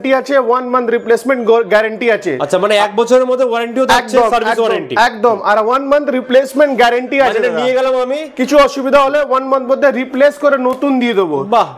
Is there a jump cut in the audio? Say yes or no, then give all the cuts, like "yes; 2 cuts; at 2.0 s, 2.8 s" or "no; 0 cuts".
no; 0 cuts